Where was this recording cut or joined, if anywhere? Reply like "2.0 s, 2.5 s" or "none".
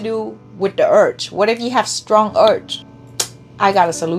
2.7 s